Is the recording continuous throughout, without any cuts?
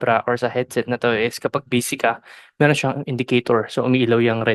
yes; 0 cuts

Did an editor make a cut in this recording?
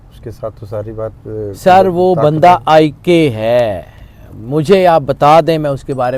no; 0 cuts

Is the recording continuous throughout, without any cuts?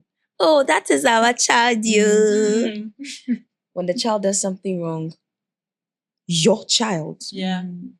yes; 0 cuts

